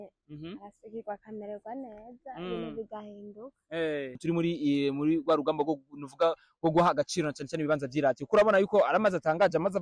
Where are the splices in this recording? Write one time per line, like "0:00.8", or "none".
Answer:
0:04.2

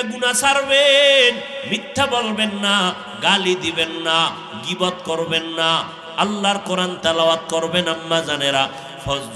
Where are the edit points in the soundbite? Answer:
0:06.1

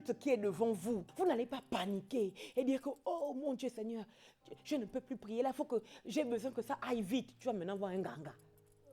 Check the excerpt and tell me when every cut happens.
0:01.1

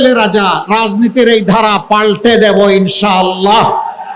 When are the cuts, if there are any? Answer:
none

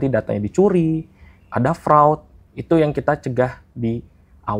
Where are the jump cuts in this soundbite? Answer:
none

